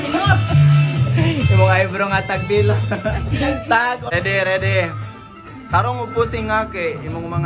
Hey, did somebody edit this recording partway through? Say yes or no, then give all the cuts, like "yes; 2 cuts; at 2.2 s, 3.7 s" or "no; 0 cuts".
yes; 1 cut; at 4.1 s